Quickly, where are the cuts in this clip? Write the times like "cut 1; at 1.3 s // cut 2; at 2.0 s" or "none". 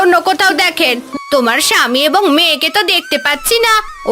cut 1; at 1.1 s